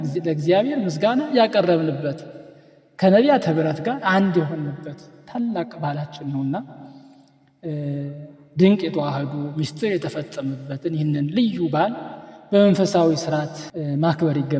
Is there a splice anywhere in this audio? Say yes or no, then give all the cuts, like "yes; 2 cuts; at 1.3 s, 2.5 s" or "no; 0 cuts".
no; 0 cuts